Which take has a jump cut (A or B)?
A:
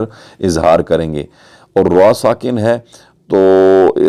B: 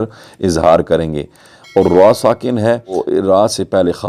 B